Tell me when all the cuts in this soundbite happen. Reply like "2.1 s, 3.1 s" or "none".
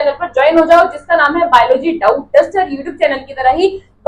none